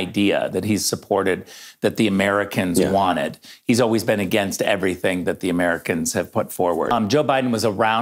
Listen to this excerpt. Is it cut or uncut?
cut